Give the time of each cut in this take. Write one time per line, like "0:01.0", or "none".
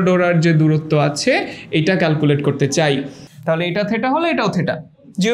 0:03.2